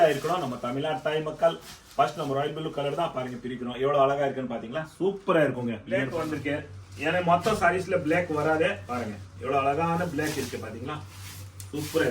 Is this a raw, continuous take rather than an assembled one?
no; 1 cut; at 6.1 s

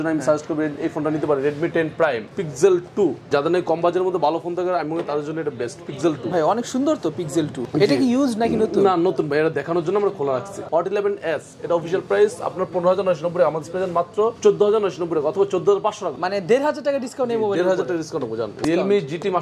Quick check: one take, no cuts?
no; 4 cuts; at 2.3 s, 3.3 s, 10.7 s, 18.6 s

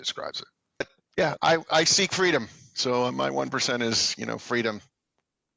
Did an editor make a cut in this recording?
yes; 1 cut; at 1.0 s

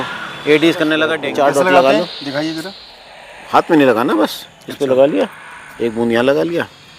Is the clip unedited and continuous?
no; 1 cut; at 1.2 s

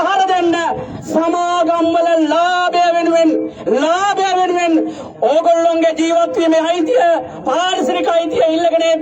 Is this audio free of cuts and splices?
yes; 0 cuts

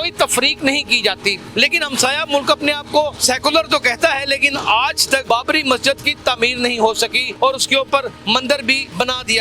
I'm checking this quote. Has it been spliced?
yes; 5 cuts; at 1.4 s, 3.2 s, 5.2 s, 7.2 s, 8.3 s

